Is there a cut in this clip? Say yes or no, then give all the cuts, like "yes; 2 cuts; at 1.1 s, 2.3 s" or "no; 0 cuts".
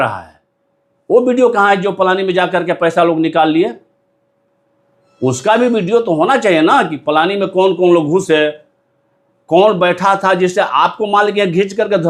no; 0 cuts